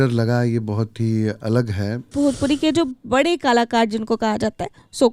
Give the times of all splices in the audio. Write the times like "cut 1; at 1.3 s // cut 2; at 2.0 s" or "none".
cut 1; at 2.1 s

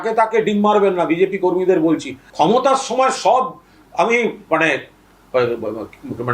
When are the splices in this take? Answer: cut 1; at 2.2 s

